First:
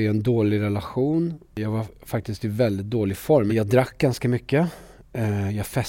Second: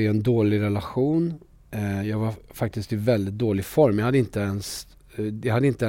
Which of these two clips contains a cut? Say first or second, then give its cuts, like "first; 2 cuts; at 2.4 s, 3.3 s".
first; 2 cuts; at 1.6 s, 3.5 s